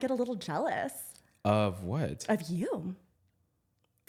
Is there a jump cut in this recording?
no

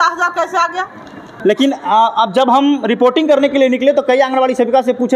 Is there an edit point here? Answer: no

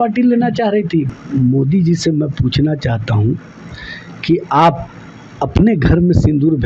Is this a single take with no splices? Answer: no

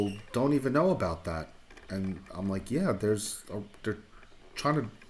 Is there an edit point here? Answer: no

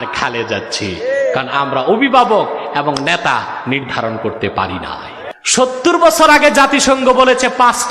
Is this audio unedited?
no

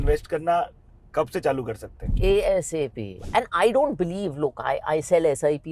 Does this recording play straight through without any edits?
no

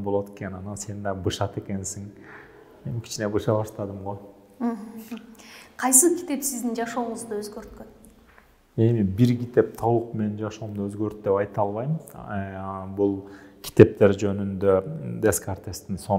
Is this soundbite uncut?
yes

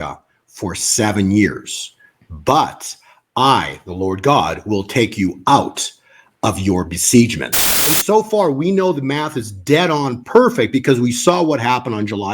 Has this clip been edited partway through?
yes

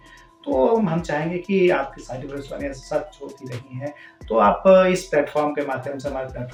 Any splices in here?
no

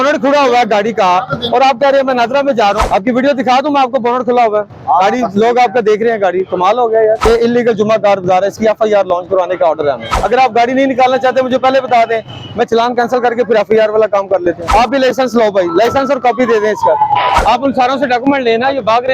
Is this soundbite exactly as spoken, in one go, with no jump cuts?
no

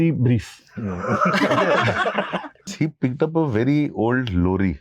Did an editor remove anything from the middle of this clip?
yes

